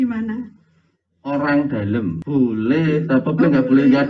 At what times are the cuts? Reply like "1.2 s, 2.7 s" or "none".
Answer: 2.2 s

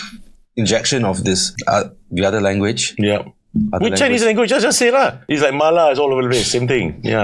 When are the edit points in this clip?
1.5 s, 5.3 s

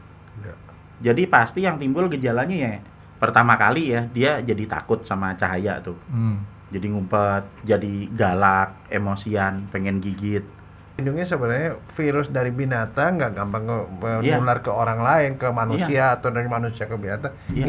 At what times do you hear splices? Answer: 11.0 s

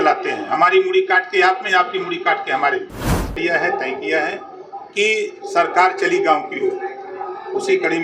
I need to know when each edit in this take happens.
3.3 s

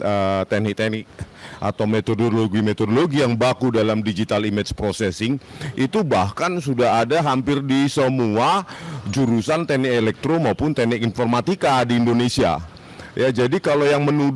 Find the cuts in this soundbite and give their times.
none

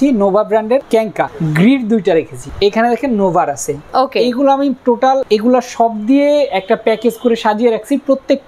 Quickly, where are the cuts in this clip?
0.9 s, 2.4 s, 5.2 s

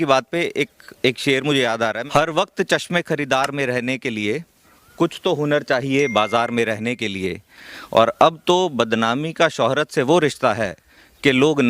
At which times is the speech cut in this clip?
2.0 s

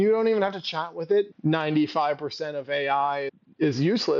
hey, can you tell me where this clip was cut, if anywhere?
1.4 s

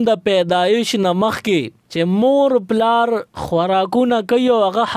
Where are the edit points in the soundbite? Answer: 1.8 s, 3.3 s

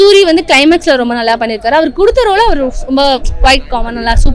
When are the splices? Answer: none

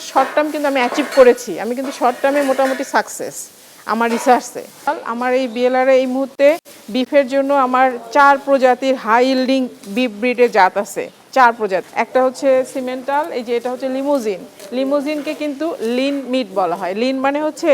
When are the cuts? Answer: 4.9 s

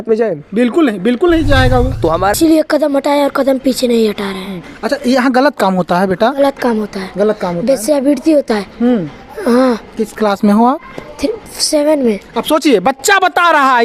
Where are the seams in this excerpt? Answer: 2.3 s

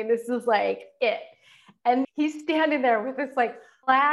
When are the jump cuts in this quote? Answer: 2.0 s

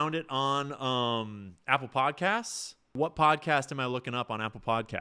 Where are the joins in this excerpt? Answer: 2.9 s

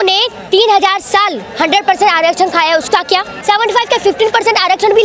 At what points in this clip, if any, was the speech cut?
3.3 s

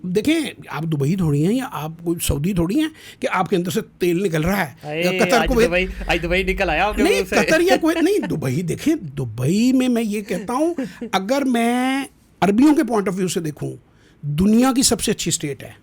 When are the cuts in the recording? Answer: none

